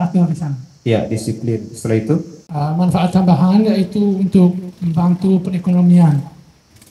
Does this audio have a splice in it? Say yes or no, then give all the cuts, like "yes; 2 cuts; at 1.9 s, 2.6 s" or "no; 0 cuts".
yes; 1 cut; at 2.4 s